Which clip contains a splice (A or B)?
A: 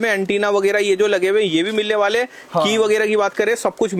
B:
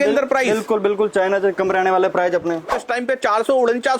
B